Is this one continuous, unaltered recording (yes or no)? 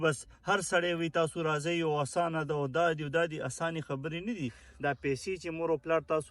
no